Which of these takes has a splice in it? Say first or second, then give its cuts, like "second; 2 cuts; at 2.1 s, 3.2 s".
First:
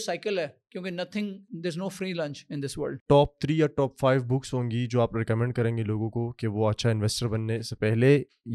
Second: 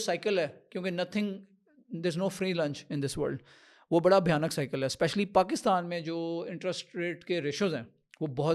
first; 2 cuts; at 1.5 s, 2.9 s